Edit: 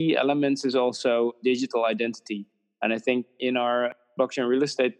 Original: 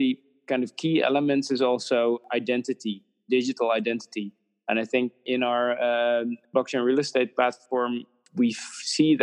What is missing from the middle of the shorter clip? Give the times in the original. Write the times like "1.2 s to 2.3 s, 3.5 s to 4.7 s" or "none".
2.2 s to 3.2 s, 5.8 s to 6.3 s